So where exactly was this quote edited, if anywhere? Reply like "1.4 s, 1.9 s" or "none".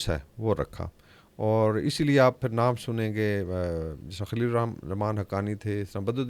none